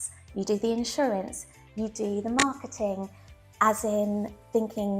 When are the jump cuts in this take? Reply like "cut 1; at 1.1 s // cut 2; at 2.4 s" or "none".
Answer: none